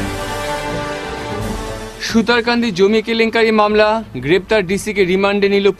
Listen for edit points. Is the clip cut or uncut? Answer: uncut